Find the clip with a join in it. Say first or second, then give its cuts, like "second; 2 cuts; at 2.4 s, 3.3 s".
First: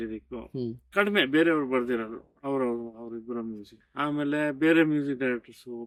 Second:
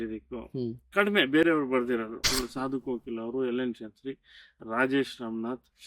second; 1 cut; at 2.3 s